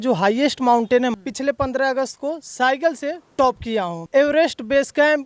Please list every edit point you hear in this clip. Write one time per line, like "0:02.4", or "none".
0:01.1
0:04.0